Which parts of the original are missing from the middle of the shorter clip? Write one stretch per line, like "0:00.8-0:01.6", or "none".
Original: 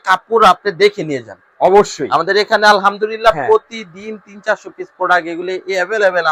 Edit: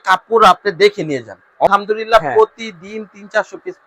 0:01.7-0:02.8